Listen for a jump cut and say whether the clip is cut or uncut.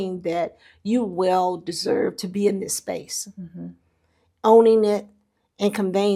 uncut